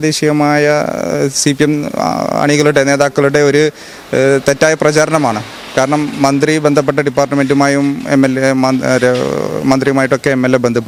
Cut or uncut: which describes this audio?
uncut